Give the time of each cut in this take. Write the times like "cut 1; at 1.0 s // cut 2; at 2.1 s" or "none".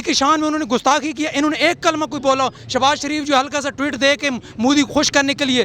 none